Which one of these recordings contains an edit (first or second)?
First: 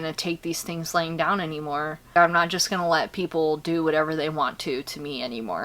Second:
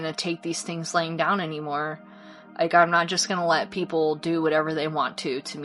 first